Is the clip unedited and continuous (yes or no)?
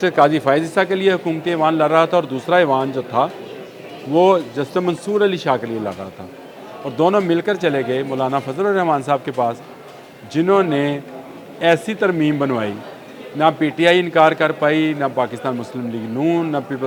yes